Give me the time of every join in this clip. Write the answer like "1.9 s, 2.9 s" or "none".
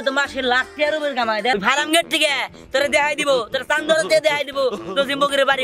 1.5 s

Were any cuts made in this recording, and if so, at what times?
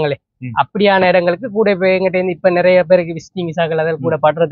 none

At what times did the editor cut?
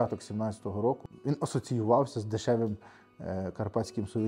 1.1 s

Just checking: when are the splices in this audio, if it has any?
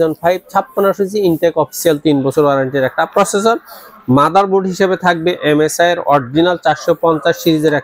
none

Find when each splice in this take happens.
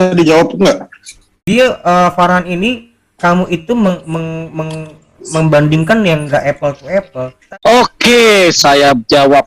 1.3 s, 7.4 s

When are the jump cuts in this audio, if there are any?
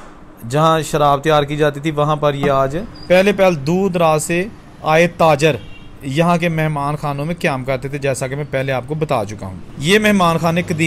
2.9 s

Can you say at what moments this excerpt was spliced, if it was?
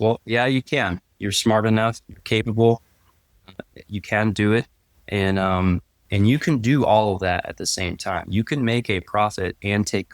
1.1 s, 6.1 s

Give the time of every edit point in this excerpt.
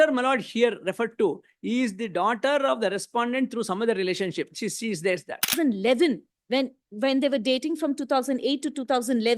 5.5 s

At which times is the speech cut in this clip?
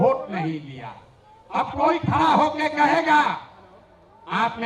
none

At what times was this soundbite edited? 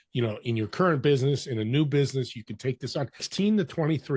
3.3 s

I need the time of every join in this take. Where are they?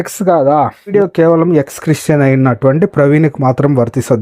0.9 s

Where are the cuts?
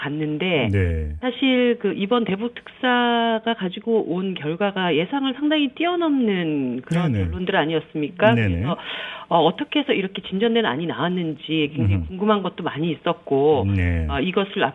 7.5 s

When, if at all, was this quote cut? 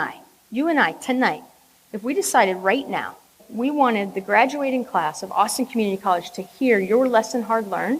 3.5 s

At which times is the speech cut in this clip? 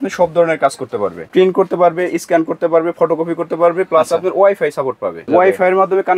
1.3 s, 5.3 s

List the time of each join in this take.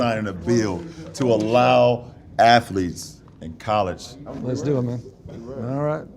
4.1 s

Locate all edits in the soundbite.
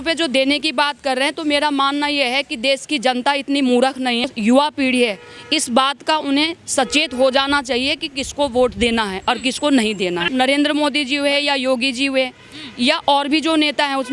4.3 s, 10.3 s

